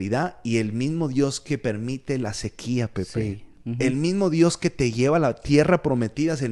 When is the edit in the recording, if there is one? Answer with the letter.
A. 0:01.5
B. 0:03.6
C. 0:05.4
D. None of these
B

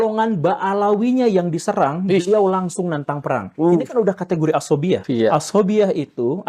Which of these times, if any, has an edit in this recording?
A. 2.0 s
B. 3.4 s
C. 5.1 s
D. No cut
C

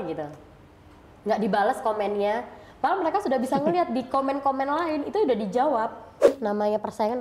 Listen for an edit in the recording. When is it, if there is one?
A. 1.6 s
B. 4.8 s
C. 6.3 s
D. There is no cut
C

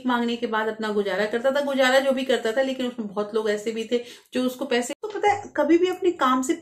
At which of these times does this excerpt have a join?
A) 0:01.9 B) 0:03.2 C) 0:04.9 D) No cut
C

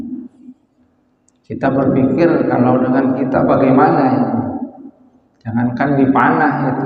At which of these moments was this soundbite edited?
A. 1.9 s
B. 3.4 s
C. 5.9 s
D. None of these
D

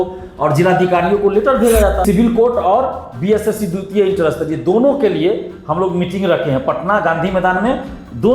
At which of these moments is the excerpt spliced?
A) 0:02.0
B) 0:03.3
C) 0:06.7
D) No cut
A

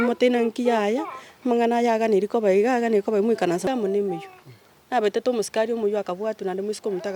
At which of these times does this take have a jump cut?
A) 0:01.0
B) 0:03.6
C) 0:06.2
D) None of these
B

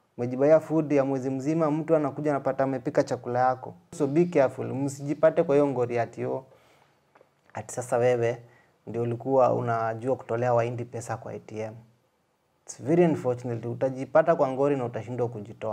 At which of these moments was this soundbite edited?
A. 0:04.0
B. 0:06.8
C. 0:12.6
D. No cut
A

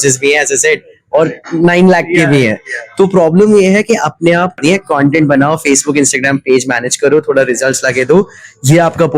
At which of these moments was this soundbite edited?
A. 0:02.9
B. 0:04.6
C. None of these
B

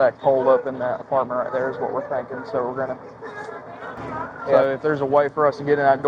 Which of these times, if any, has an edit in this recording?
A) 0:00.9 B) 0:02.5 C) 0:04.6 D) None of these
C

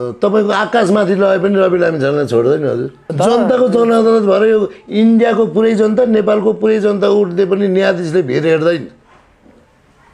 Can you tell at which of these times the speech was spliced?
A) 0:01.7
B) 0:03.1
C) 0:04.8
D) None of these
B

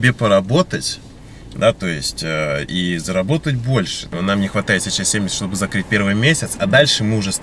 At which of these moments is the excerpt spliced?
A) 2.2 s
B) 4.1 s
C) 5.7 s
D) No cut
B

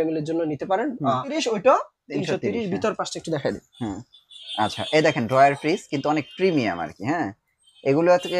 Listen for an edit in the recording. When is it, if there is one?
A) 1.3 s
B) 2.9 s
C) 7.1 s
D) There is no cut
A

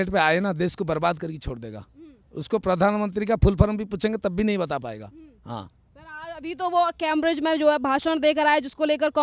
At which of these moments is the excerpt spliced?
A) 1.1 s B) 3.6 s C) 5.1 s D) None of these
D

